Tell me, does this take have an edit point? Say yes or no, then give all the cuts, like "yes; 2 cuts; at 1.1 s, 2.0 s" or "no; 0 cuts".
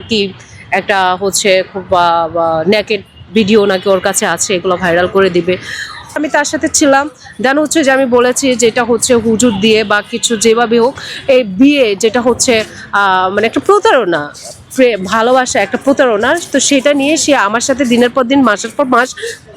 yes; 1 cut; at 6.2 s